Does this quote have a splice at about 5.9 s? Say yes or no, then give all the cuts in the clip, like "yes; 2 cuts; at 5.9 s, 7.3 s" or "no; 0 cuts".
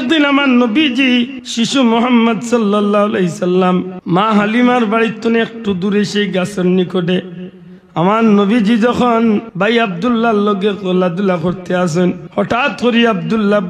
no; 4 cuts; at 1.4 s, 4.0 s, 9.5 s, 12.2 s